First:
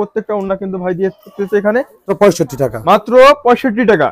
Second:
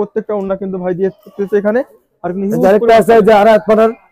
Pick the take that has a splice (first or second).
first